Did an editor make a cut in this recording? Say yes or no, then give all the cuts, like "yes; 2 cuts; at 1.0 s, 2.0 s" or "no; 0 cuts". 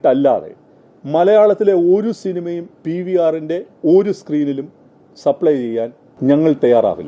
yes; 1 cut; at 6.0 s